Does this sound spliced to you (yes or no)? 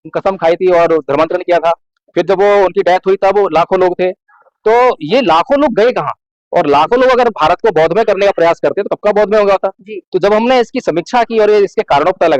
no